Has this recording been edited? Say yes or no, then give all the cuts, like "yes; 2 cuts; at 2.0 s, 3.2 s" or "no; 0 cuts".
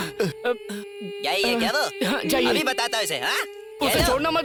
no; 0 cuts